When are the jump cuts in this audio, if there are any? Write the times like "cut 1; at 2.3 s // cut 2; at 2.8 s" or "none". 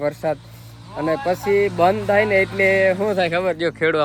none